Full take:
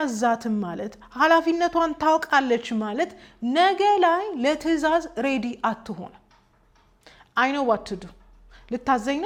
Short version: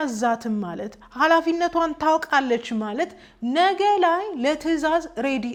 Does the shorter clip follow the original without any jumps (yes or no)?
yes